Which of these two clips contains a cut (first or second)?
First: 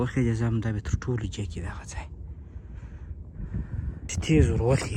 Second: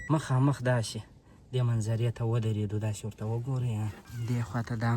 second